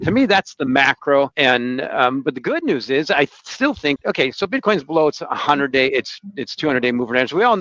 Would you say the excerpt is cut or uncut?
cut